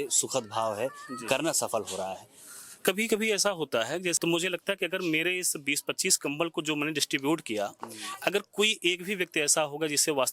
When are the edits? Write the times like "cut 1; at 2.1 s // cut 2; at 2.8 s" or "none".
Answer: cut 1; at 4.2 s